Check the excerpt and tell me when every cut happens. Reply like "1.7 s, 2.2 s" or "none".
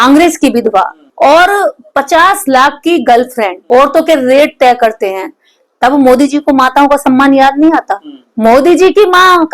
1.0 s, 3.6 s